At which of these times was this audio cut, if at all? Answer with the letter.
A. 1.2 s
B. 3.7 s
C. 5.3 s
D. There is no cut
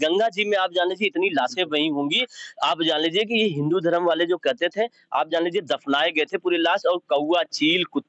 D